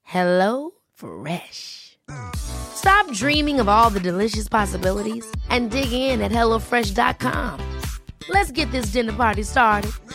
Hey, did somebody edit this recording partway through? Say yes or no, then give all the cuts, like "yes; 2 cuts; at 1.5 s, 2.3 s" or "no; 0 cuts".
no; 0 cuts